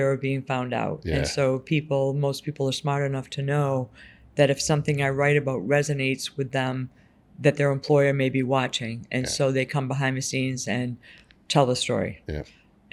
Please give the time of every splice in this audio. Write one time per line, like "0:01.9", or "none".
none